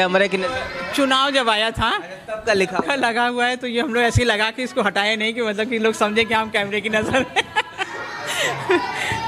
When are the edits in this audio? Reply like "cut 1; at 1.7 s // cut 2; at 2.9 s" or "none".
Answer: none